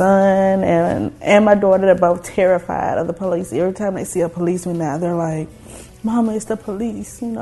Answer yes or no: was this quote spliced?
no